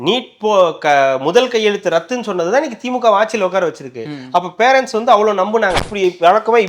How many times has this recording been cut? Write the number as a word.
one